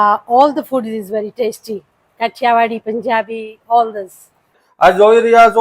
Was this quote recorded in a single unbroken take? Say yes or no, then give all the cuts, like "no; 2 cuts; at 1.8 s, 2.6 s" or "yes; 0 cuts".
no; 1 cut; at 4.6 s